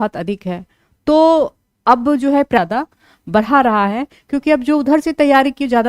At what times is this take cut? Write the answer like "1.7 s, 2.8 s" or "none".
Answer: 2.6 s